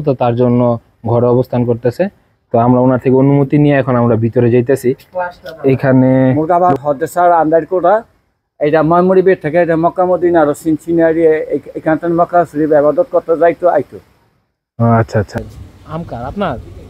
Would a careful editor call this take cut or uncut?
cut